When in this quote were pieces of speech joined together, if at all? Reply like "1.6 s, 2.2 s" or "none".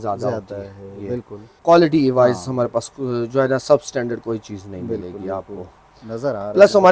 1.6 s